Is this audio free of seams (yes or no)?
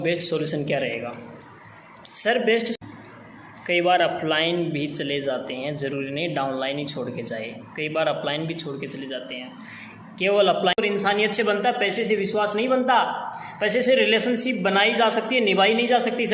no